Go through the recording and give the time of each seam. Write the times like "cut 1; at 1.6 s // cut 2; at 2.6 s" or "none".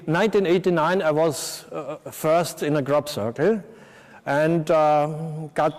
cut 1; at 2.4 s